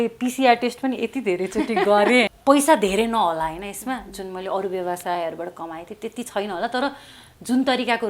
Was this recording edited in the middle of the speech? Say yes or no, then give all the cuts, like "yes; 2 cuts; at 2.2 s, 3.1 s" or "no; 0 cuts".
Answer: yes; 1 cut; at 2.3 s